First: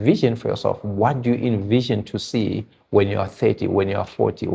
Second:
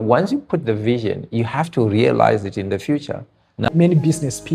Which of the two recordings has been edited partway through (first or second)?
second